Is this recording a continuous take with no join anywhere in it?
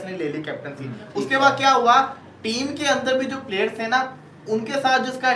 yes; 0 cuts

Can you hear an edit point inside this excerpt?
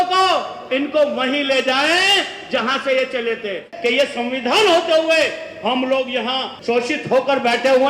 yes; 2 cuts; at 3.7 s, 6.5 s

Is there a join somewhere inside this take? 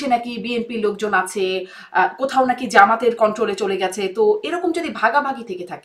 no; 0 cuts

